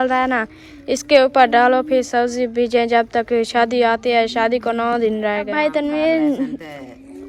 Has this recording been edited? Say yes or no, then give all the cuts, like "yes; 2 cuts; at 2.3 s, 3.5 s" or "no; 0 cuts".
yes; 1 cut; at 5.5 s